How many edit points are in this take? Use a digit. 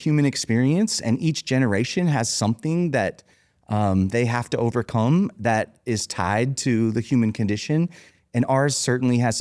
0